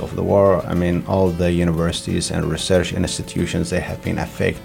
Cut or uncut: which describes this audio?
uncut